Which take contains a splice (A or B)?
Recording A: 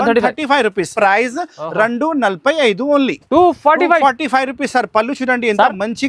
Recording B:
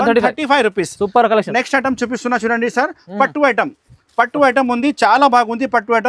A